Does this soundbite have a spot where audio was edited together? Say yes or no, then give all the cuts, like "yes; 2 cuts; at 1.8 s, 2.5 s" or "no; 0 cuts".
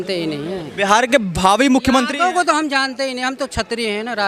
no; 0 cuts